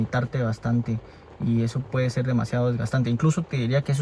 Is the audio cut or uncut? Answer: uncut